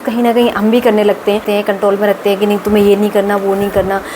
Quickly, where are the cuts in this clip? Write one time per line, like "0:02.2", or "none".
0:01.4